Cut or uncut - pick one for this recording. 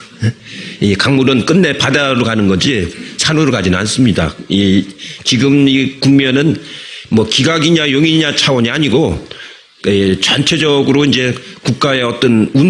uncut